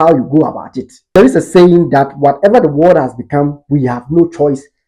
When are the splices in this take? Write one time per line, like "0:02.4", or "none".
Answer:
0:01.1